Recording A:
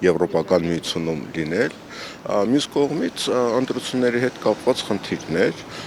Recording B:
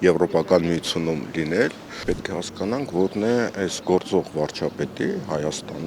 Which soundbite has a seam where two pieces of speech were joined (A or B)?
B